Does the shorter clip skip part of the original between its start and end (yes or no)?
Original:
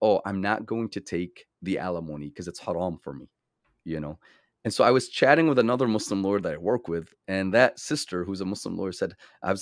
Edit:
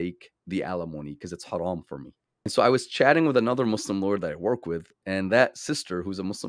yes